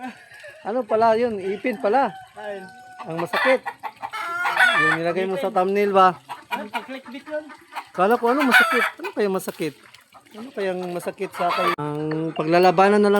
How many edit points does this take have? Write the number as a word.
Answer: one